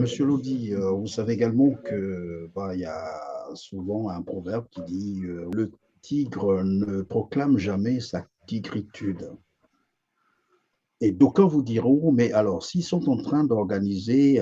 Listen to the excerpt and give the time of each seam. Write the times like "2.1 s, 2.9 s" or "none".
5.5 s